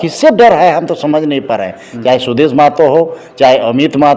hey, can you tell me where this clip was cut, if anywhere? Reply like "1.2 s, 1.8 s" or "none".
none